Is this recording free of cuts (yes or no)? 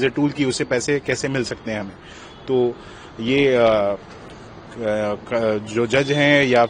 yes